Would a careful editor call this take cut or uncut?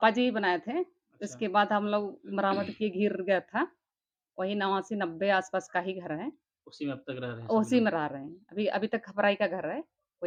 uncut